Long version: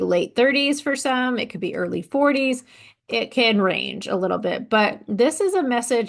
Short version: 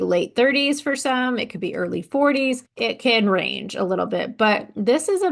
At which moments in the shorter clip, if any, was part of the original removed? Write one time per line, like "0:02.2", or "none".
0:02.7

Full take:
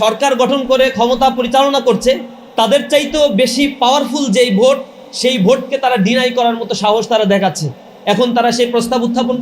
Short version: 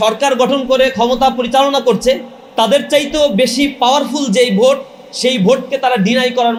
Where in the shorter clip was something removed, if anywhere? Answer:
none

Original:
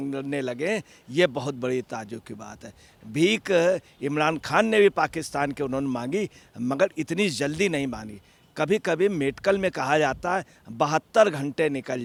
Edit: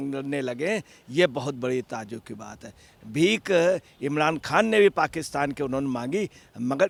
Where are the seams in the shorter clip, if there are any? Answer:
none

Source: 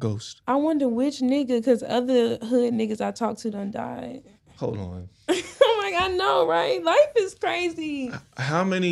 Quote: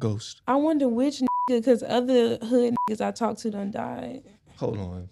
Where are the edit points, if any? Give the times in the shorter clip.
none

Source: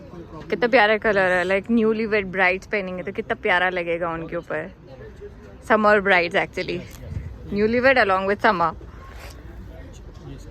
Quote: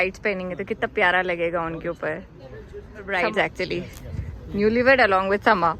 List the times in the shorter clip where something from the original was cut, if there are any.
0:03.2

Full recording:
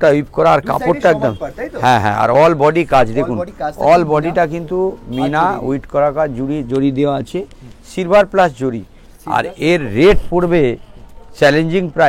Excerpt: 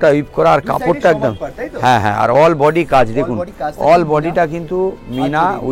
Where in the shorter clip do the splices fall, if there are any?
none

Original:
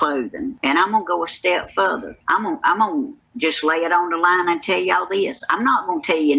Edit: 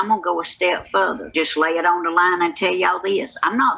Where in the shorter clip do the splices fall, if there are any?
0:01.2

